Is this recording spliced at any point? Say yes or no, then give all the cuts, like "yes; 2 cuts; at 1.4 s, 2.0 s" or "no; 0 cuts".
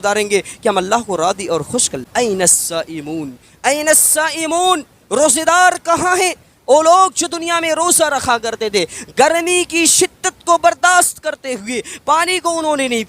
yes; 1 cut; at 2.1 s